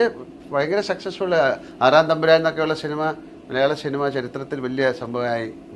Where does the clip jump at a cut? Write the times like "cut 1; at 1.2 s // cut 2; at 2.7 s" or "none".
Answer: none